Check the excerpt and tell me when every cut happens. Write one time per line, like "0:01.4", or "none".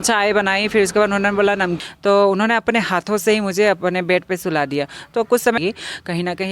0:01.8
0:05.6